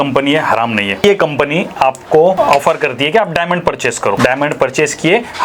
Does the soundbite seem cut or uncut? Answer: cut